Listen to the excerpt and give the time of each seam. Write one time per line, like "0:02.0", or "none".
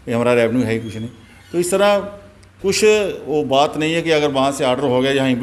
none